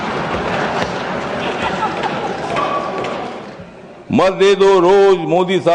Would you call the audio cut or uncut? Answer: cut